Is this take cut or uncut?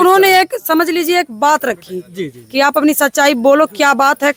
uncut